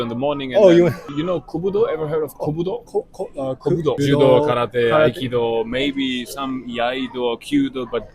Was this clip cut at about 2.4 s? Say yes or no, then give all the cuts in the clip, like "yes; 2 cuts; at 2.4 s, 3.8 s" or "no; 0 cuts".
no; 2 cuts; at 1.1 s, 4.0 s